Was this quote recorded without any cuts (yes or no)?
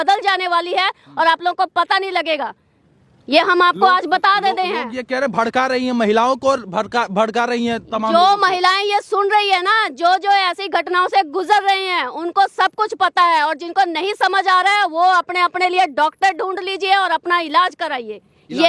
yes